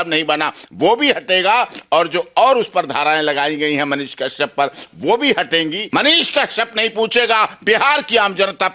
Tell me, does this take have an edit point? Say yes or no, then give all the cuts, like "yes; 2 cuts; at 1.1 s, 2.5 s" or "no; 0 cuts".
yes; 1 cut; at 5.8 s